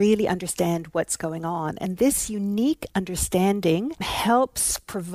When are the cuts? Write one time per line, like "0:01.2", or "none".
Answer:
0:04.1

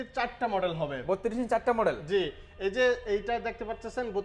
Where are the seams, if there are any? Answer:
none

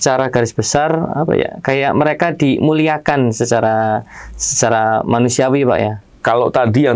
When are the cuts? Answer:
0:06.0

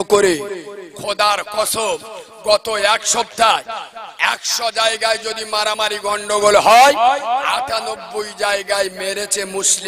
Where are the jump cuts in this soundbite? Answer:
none

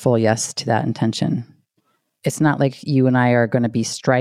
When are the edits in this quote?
0:02.1

